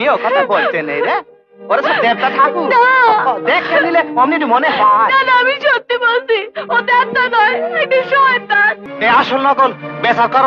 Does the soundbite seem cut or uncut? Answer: cut